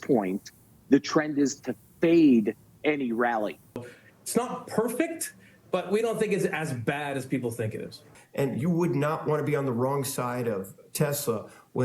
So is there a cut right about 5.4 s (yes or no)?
no